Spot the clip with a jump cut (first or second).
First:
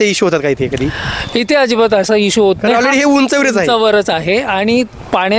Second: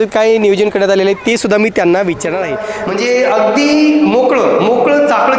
second